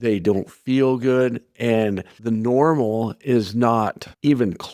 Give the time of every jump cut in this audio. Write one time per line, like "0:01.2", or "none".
none